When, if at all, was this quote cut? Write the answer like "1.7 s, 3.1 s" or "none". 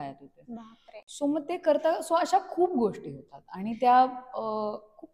none